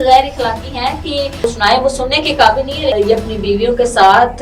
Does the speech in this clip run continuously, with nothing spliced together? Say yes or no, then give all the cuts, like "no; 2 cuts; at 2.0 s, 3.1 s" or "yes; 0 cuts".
no; 2 cuts; at 1.5 s, 2.9 s